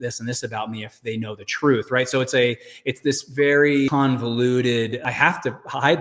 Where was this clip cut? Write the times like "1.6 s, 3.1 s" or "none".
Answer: 3.9 s, 5.0 s